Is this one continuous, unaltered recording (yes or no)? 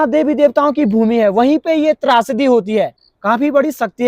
no